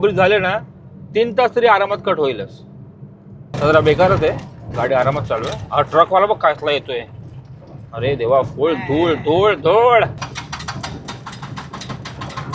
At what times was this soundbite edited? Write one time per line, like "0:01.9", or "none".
0:03.6
0:10.2